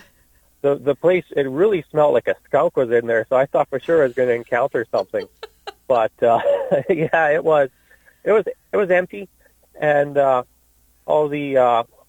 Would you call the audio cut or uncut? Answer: uncut